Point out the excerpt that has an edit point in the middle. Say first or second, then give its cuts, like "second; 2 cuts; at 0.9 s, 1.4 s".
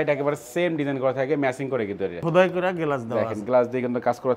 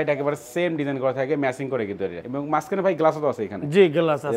first; 1 cut; at 2.2 s